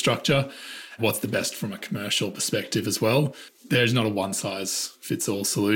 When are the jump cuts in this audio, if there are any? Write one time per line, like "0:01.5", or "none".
0:01.0
0:03.7